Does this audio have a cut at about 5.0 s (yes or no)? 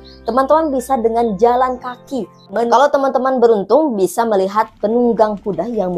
no